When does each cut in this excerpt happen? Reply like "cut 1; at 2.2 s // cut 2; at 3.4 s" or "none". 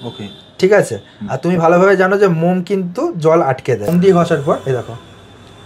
cut 1; at 3.9 s